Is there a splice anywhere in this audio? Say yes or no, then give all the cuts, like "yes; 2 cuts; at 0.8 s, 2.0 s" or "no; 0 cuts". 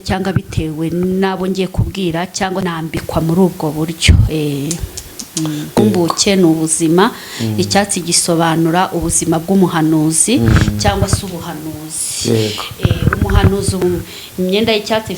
yes; 3 cuts; at 2.7 s, 5.8 s, 13.8 s